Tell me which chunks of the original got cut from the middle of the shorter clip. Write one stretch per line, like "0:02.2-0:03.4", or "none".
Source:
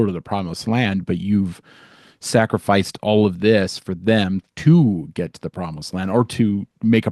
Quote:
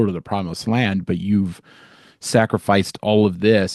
none